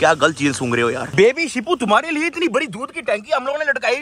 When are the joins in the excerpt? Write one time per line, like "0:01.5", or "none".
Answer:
0:01.0

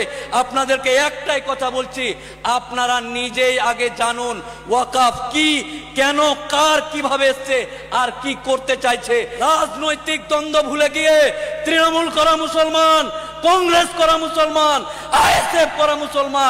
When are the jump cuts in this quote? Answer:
0:09.3

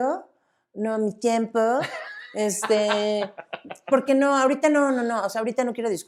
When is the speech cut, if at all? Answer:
none

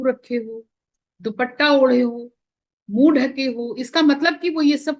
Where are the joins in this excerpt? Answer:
none

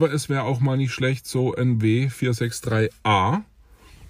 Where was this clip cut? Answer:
none

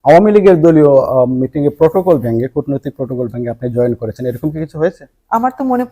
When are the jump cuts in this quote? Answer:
none

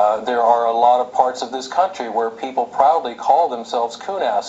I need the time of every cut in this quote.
none

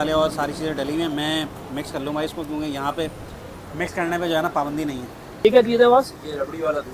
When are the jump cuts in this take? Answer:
0:05.4

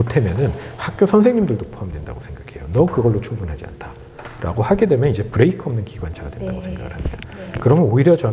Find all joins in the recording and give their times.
none

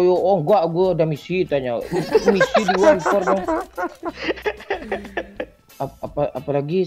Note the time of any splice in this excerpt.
0:05.6

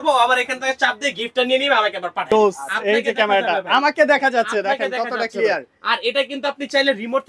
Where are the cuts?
0:02.3

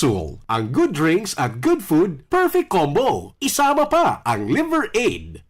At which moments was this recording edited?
none

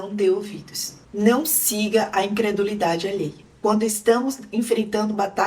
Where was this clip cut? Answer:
0:01.0
0:03.4

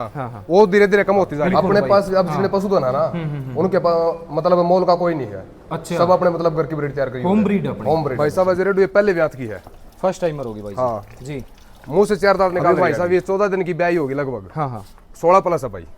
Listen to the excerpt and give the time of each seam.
0:01.4
0:08.1
0:12.7

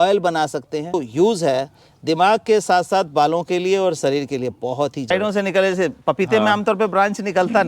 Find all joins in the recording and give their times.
0:01.0
0:05.1

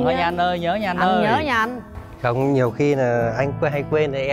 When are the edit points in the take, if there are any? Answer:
none

